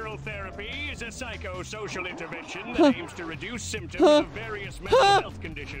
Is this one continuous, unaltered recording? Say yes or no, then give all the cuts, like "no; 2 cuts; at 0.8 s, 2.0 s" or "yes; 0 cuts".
yes; 0 cuts